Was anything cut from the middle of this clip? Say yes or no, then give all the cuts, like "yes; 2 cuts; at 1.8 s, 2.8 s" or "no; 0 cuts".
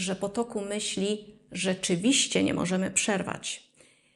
no; 0 cuts